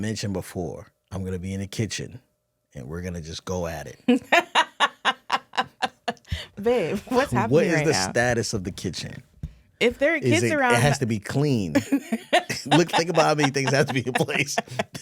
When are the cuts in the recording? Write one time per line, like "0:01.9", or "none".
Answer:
0:00.9